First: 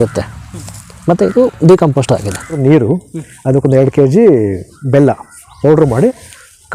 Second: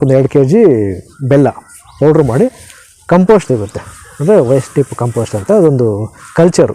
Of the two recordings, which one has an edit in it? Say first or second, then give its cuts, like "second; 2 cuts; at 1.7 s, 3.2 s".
first; 1 cut; at 2.6 s